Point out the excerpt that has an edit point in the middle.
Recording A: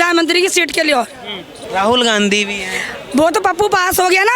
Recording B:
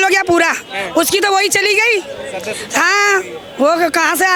A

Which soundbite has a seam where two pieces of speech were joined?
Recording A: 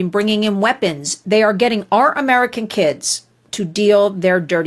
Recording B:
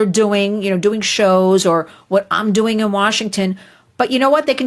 A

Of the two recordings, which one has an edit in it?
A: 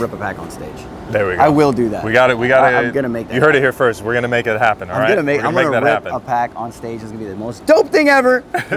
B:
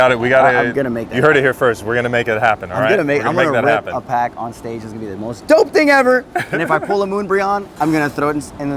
B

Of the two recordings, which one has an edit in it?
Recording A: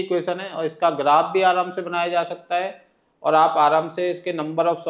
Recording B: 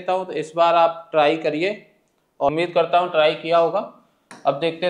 B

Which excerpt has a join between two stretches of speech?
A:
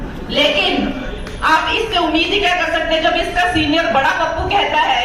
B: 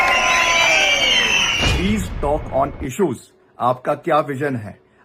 B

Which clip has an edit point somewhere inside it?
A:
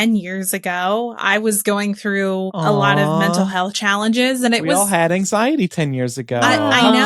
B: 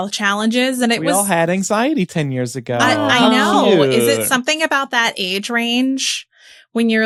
A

